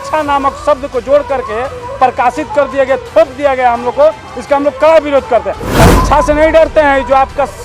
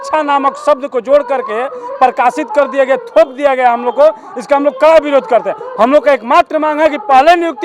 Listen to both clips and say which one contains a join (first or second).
first